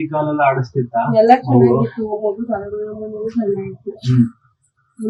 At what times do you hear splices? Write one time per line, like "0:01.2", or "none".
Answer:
none